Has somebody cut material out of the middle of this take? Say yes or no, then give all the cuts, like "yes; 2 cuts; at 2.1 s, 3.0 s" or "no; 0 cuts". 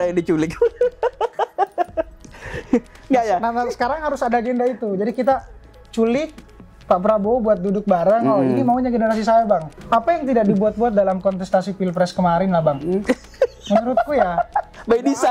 yes; 1 cut; at 9.7 s